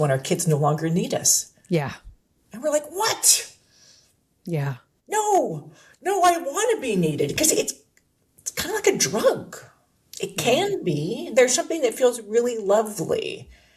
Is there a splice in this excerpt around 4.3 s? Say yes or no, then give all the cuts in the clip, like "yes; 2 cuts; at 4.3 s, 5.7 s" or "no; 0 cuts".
no; 0 cuts